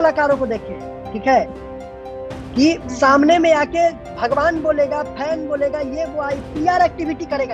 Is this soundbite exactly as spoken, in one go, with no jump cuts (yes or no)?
yes